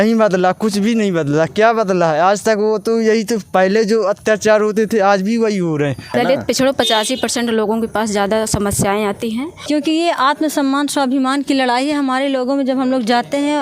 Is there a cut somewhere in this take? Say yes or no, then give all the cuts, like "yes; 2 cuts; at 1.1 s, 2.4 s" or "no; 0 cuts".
yes; 2 cuts; at 6.1 s, 9.5 s